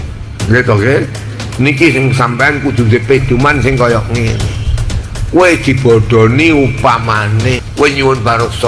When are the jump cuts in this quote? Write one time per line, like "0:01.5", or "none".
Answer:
0:07.6